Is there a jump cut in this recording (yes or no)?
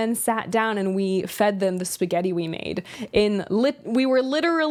no